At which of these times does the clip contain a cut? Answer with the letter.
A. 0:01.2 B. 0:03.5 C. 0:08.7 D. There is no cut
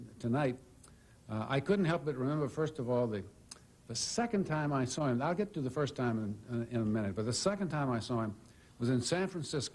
A